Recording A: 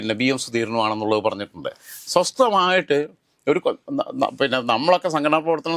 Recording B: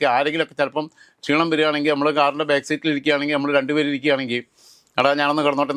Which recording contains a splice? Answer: A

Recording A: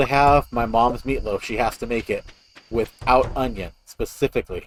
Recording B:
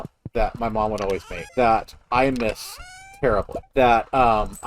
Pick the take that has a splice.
B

